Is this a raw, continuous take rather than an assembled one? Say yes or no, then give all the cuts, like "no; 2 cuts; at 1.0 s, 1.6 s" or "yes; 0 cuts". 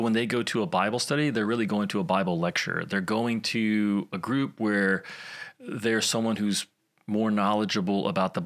yes; 0 cuts